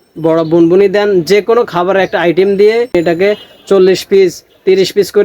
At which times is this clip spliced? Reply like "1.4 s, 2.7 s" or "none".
3.0 s

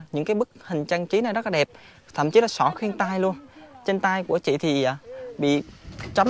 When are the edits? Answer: none

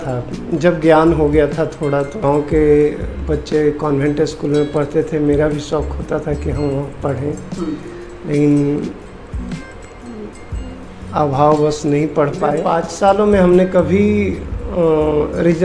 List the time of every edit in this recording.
2.2 s, 12.6 s

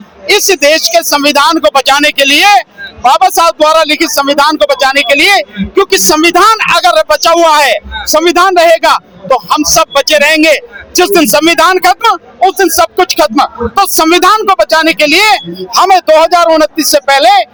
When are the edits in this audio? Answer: none

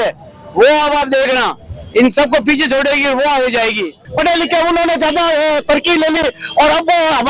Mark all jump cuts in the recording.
4.0 s

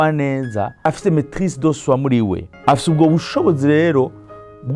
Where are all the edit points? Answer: 0.9 s, 2.5 s

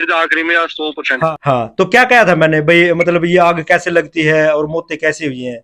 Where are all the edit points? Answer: 1.3 s

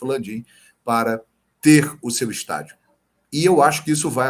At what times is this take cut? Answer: none

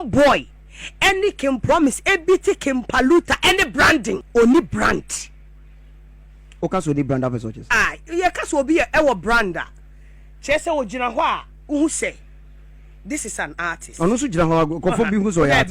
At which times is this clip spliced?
4.2 s

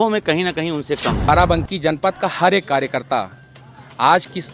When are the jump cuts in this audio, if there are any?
1.3 s

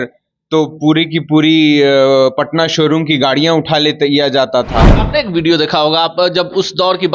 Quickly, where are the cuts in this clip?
4.9 s

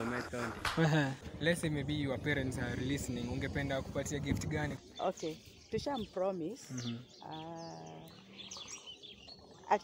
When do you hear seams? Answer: 1.3 s, 4.8 s

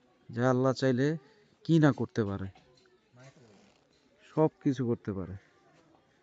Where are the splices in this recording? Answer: none

